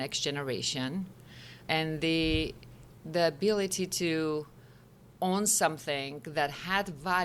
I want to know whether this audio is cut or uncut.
uncut